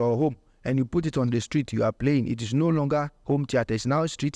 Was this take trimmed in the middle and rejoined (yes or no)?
no